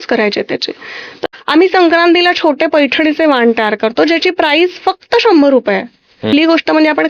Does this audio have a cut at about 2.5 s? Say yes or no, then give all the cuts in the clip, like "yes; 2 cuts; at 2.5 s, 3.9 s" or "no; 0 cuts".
no; 2 cuts; at 1.2 s, 6.3 s